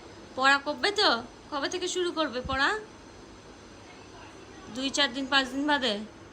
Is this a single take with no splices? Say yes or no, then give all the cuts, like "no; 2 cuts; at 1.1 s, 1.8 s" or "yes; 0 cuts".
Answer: yes; 0 cuts